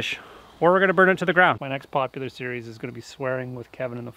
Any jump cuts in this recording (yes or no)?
yes